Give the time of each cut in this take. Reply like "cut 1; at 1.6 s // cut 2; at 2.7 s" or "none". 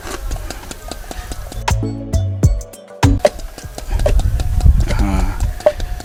none